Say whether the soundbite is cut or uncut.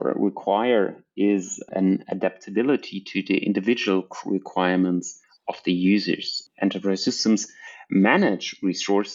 uncut